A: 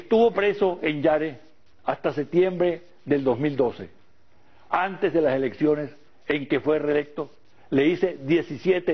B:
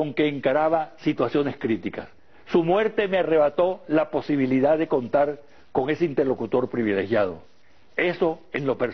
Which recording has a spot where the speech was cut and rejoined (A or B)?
B